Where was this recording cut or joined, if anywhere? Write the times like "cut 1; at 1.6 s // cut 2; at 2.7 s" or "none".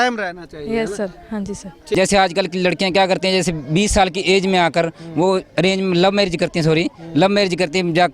cut 1; at 1.8 s